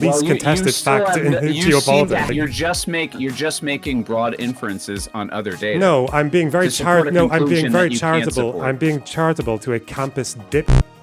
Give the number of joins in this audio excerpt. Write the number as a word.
one